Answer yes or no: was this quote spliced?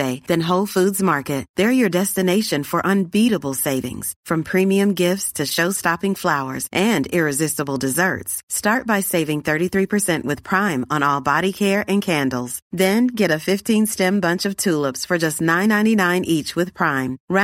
no